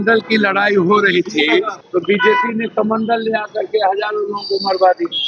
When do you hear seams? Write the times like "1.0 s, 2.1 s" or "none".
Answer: 1.8 s